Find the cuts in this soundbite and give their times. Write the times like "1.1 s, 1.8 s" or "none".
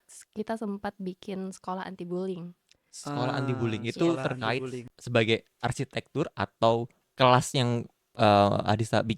4.9 s